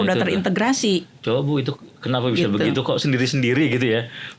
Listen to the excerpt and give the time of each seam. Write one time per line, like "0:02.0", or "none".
none